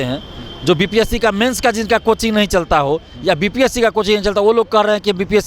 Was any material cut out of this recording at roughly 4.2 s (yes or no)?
no